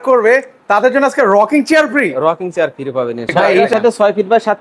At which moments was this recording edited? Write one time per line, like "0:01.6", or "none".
0:03.7